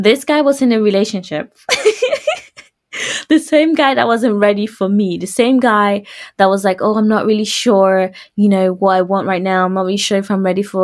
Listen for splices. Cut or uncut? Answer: cut